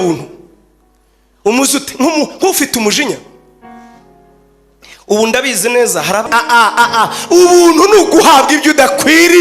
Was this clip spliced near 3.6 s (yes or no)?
no